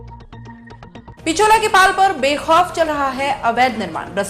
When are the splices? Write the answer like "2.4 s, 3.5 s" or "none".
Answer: 1.0 s